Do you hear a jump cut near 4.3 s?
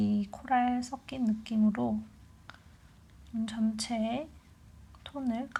no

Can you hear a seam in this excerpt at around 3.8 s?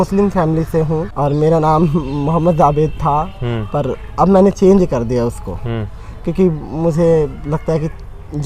no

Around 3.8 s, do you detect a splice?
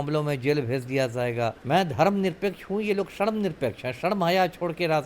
no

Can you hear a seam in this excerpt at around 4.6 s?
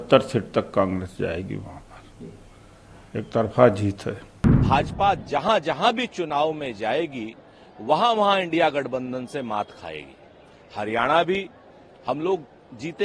yes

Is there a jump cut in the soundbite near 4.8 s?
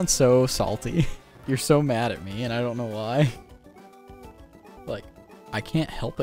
yes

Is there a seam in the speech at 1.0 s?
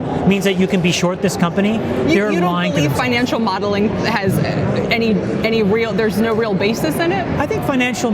no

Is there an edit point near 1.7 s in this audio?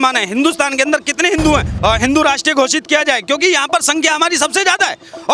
yes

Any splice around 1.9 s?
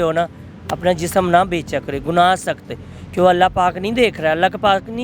no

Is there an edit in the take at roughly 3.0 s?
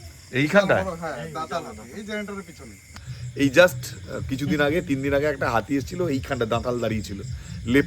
yes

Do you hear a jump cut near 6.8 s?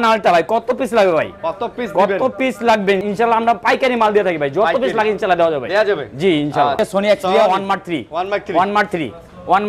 yes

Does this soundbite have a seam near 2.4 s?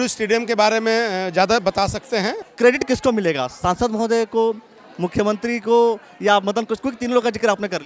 yes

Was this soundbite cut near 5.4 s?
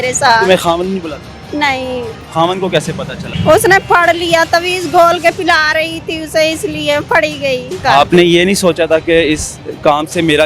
no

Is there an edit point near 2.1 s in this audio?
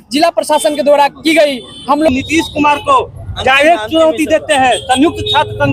yes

